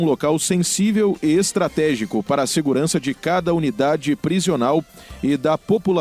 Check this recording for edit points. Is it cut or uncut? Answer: uncut